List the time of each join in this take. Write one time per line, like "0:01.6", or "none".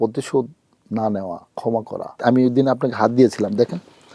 0:02.2

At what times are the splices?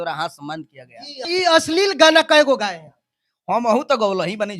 0:01.2

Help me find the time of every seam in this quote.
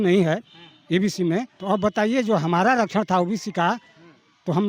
0:01.5

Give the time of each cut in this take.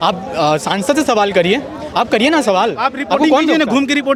none

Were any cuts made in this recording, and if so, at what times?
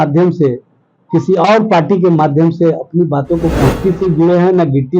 0:03.8

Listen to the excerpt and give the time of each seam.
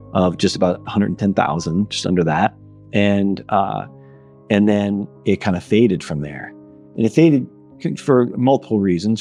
none

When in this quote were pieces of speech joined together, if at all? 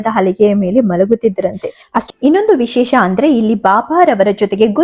0:02.0

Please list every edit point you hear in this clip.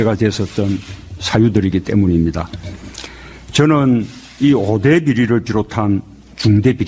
0:03.4

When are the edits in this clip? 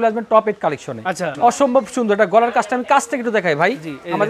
0:01.3

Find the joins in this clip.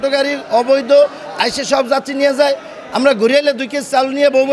none

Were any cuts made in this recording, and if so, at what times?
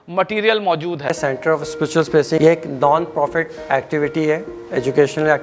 0:01.2
0:02.4

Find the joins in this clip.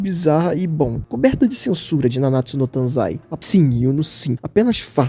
0:03.3

